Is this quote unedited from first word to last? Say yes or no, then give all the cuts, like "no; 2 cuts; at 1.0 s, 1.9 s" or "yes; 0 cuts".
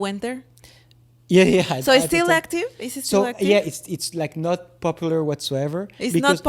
yes; 0 cuts